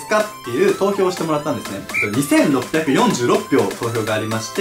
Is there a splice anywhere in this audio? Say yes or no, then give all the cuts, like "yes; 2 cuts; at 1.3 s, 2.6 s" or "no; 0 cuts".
no; 0 cuts